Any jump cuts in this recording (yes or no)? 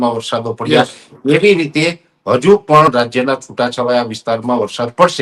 no